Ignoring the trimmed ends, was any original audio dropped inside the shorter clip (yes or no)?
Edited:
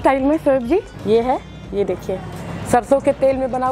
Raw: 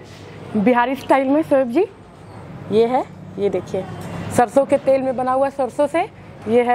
yes